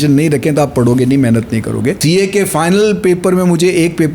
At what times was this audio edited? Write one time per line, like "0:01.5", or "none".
0:02.0